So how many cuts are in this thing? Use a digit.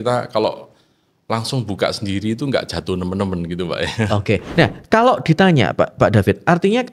1